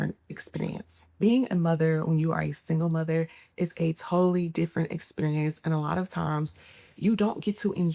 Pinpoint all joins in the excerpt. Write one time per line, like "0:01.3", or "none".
none